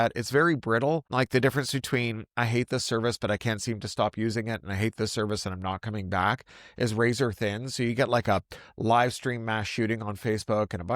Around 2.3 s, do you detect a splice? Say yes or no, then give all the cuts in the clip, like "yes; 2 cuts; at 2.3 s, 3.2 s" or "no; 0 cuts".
no; 1 cut; at 1.1 s